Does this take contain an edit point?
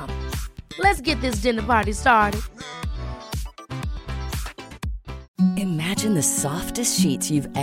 yes; 1 cut; at 5.2 s

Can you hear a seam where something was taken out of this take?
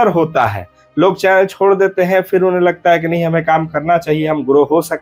no; 0 cuts

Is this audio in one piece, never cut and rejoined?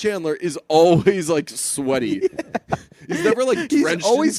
yes; 0 cuts

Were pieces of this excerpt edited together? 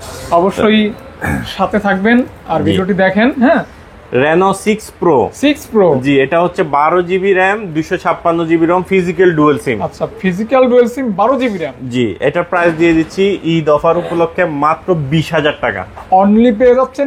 no; 0 cuts

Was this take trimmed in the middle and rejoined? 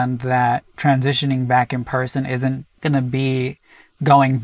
yes; 1 cut; at 2.8 s

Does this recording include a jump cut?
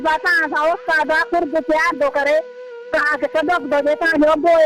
no; 0 cuts

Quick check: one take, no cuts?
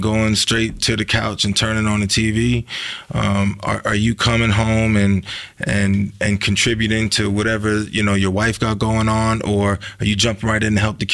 yes; 0 cuts

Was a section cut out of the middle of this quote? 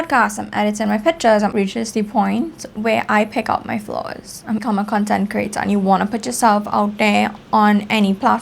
yes; 2 cuts; at 1.5 s, 4.6 s

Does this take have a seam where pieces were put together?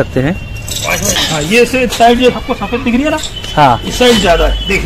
yes; 1 cut; at 1.2 s

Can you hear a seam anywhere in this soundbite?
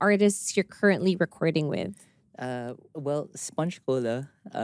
no; 0 cuts

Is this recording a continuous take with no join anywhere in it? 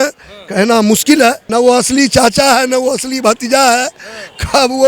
no; 1 cut; at 1.4 s

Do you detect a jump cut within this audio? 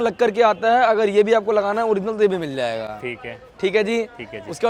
no; 0 cuts

